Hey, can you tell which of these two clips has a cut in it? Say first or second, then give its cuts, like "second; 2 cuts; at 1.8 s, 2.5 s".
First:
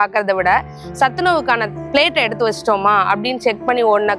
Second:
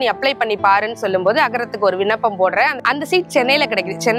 second; 1 cut; at 2.8 s